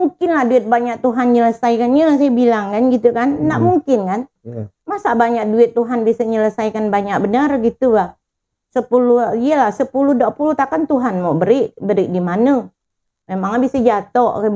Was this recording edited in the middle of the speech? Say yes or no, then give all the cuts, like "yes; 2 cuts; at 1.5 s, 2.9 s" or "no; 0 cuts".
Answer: no; 0 cuts